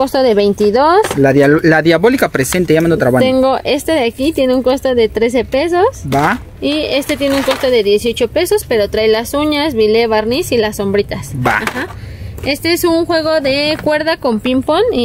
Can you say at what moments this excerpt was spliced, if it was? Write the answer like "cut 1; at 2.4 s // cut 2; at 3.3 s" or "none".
none